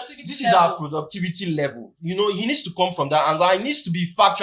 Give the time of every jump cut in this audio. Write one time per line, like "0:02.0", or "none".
none